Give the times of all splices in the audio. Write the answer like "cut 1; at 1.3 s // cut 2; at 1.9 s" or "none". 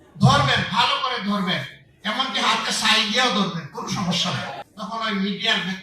cut 1; at 4.6 s